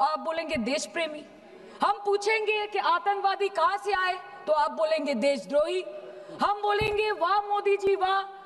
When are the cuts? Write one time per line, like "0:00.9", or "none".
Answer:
none